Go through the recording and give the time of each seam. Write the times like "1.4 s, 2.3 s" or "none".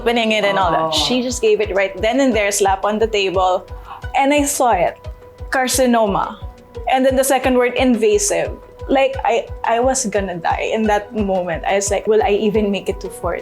12.0 s